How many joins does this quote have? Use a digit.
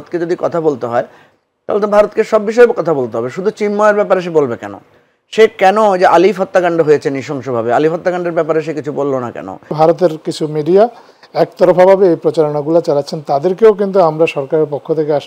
1